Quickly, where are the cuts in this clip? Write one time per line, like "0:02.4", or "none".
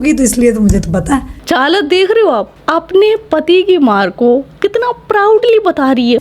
none